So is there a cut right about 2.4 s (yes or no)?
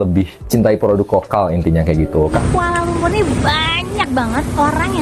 yes